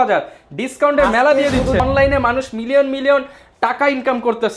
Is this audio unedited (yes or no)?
no